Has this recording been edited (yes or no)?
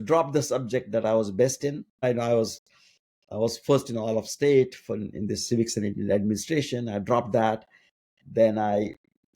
yes